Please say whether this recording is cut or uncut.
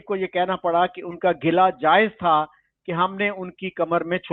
uncut